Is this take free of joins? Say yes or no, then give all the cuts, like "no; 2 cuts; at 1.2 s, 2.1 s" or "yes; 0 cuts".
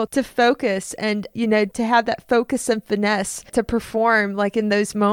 yes; 0 cuts